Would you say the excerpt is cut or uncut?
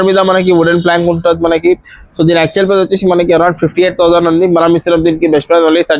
uncut